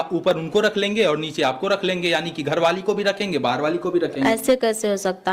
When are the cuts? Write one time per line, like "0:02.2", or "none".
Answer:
none